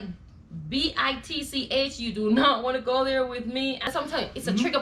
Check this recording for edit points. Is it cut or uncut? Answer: cut